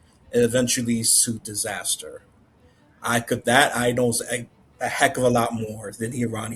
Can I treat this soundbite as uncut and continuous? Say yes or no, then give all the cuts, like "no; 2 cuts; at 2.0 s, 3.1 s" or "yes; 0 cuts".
yes; 0 cuts